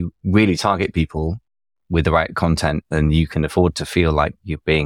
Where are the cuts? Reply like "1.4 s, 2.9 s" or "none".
none